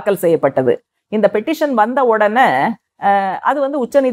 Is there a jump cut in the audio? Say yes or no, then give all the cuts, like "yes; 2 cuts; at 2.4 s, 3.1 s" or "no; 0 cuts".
no; 0 cuts